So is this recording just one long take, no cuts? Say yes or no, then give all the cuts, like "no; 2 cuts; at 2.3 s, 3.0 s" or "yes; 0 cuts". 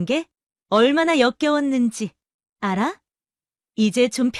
yes; 0 cuts